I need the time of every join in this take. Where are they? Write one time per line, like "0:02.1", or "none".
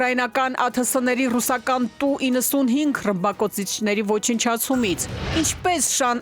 0:05.2